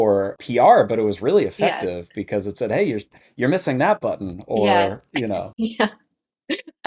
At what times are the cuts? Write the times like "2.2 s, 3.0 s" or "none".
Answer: none